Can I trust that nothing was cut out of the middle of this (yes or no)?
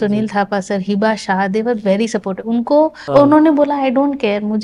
no